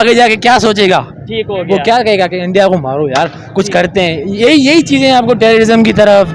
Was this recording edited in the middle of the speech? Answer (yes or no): no